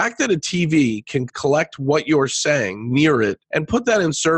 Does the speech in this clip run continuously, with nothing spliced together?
no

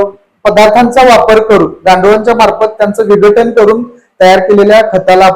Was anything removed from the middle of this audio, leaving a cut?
no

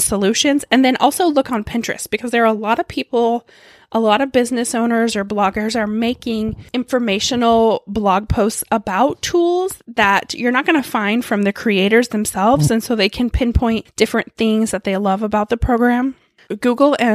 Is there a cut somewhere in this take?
no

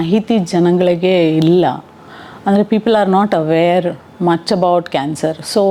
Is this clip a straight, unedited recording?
yes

